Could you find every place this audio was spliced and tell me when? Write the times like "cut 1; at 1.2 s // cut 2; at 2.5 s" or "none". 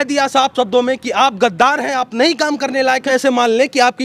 cut 1; at 3.1 s